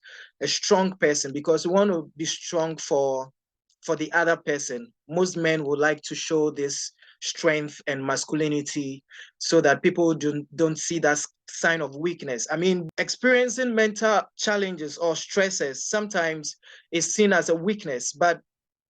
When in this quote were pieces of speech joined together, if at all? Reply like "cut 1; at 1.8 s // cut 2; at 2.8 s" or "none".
cut 1; at 12.8 s // cut 2; at 14.3 s